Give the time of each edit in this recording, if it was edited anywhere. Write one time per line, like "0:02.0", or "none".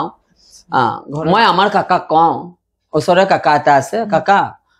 0:01.0